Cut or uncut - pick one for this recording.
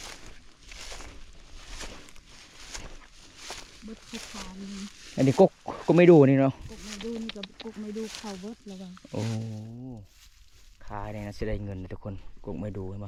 uncut